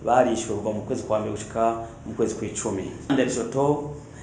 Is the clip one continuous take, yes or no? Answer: no